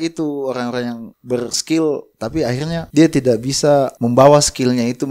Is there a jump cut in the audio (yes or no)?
yes